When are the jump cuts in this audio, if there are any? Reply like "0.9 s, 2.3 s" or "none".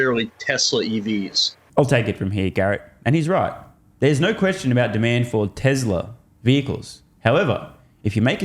none